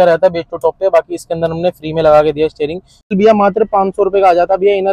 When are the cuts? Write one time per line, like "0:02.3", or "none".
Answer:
0:03.1